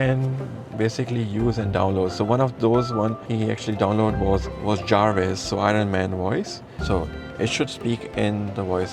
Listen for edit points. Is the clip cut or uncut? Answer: cut